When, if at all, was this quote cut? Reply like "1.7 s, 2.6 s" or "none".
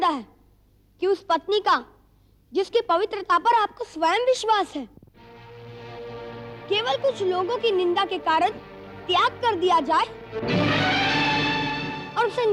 none